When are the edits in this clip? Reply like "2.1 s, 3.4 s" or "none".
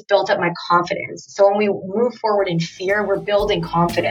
none